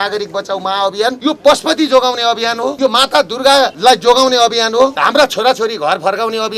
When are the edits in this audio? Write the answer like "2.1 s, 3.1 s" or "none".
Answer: 1.2 s, 2.7 s, 3.7 s, 5.0 s